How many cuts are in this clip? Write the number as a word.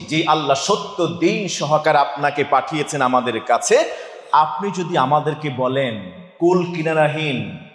zero